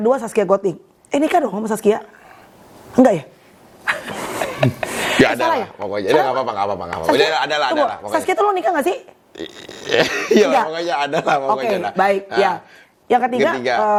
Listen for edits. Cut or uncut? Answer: uncut